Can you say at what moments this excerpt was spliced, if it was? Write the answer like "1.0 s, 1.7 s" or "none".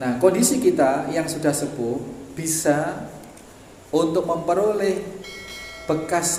none